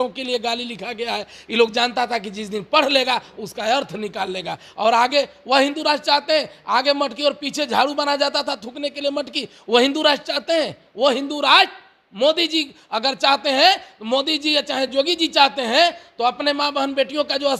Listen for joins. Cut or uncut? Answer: uncut